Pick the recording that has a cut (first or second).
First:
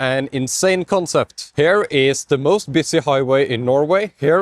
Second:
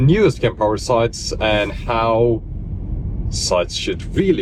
first